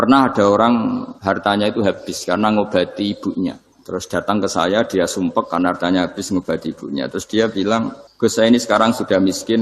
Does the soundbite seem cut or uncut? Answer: cut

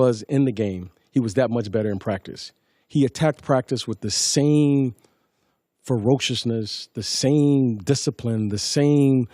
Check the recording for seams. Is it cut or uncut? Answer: uncut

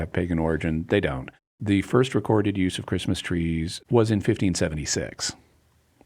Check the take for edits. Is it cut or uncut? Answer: cut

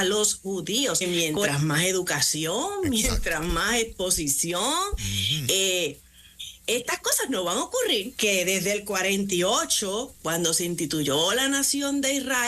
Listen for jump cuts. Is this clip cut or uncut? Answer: cut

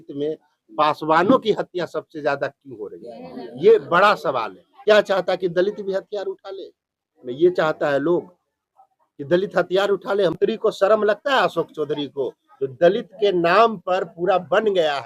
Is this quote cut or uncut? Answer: cut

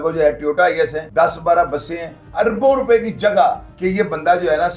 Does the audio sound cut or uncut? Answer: cut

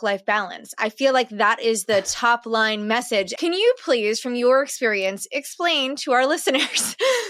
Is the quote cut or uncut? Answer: cut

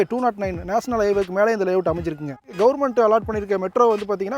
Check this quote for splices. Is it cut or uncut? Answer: cut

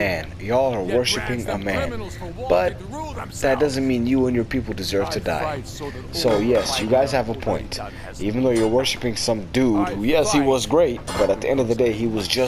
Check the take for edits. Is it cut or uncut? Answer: uncut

